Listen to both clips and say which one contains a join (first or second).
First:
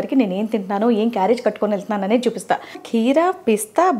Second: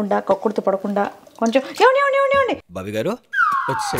first